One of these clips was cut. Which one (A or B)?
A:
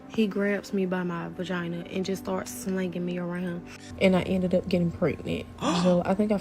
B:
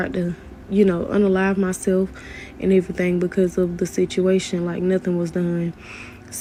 A